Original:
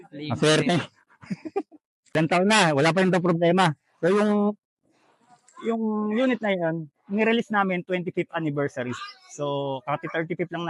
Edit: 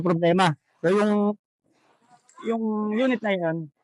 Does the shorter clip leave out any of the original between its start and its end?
no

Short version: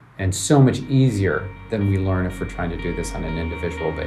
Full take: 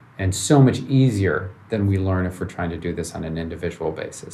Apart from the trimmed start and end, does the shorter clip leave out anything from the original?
no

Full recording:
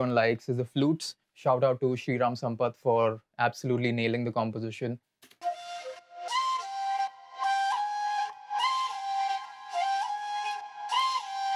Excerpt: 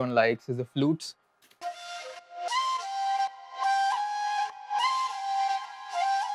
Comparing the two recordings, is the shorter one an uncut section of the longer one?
no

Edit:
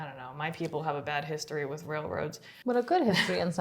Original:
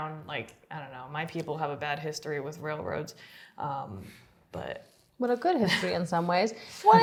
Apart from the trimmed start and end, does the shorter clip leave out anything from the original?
yes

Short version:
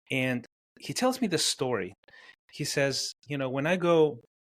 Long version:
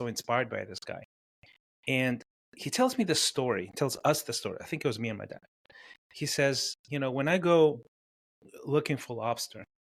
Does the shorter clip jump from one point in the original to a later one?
yes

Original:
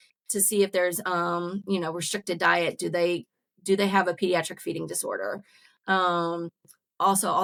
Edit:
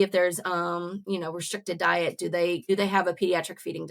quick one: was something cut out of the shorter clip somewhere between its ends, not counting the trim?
yes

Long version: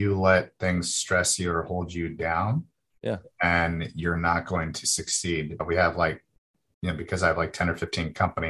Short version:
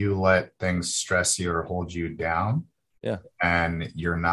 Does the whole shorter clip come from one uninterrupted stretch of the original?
yes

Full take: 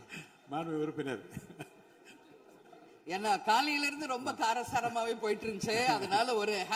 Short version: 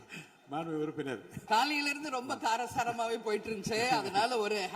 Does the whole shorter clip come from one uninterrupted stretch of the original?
no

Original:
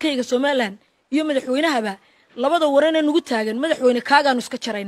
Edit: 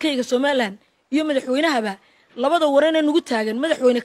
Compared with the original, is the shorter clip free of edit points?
yes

